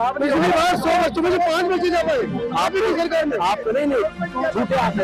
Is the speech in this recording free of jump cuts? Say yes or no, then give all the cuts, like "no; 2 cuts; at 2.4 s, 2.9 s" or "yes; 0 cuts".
yes; 0 cuts